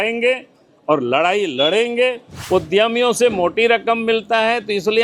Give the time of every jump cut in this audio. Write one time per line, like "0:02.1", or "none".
0:02.3